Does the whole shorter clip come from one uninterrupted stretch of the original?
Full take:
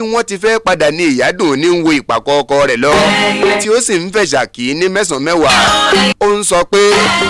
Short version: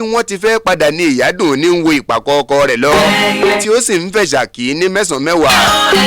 yes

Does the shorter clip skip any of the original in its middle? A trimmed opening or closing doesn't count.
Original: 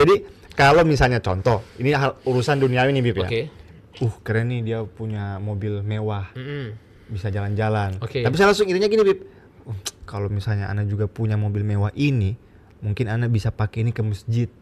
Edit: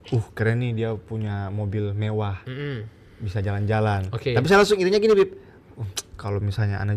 no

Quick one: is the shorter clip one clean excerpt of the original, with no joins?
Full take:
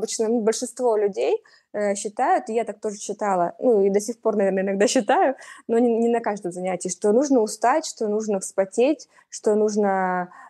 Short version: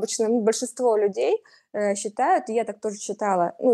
yes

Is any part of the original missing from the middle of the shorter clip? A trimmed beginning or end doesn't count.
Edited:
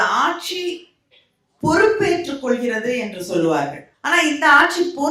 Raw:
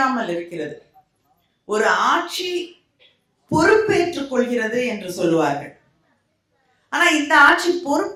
yes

